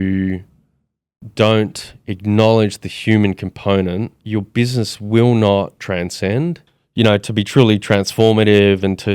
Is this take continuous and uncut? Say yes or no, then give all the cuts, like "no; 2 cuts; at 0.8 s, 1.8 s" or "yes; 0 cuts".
no; 3 cuts; at 4.2 s, 5.8 s, 6.7 s